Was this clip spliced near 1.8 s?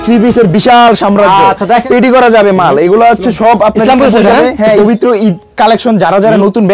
yes; 2 cuts; at 1.8 s, 4.8 s

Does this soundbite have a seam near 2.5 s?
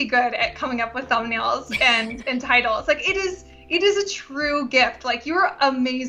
no; 0 cuts

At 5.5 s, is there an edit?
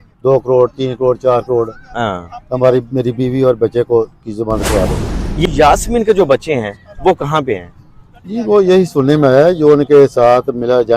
yes; 1 cut; at 5.5 s

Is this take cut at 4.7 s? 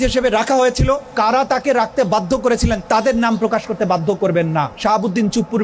yes; 3 cuts; at 1.1 s, 2.8 s, 4.7 s

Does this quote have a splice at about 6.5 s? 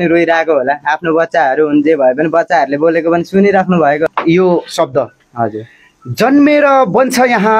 no; 1 cut; at 4.1 s

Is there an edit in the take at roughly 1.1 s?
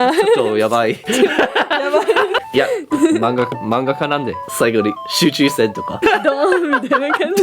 no; 3 cuts; at 2.4 s, 4.4 s, 6.0 s

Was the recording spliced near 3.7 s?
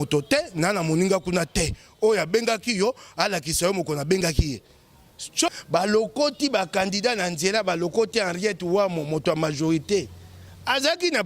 no; 1 cut; at 5.5 s

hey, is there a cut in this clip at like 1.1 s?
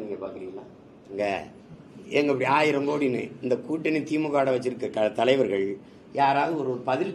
yes; 1 cut; at 1.1 s

